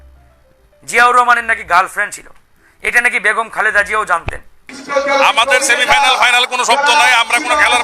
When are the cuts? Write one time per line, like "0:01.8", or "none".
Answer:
0:04.8